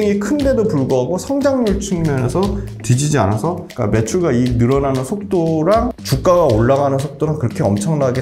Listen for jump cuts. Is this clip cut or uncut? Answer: cut